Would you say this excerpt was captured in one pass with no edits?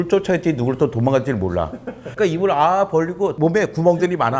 yes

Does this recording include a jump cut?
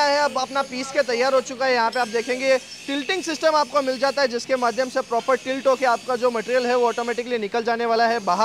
no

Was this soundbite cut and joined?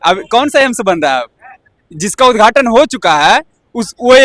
no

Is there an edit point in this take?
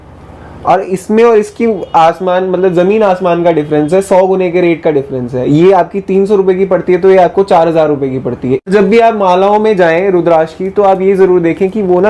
yes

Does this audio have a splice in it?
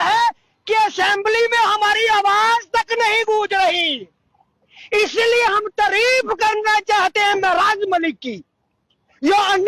no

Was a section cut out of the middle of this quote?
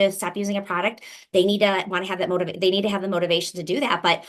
no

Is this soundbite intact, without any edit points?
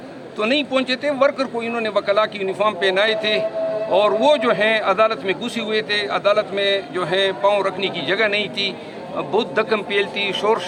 yes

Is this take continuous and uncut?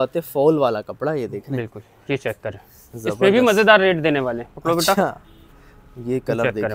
yes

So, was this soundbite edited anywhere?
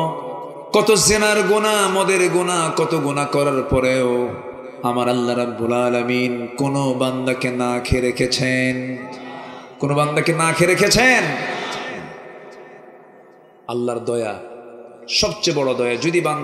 no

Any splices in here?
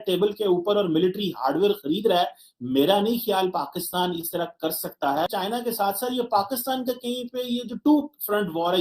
yes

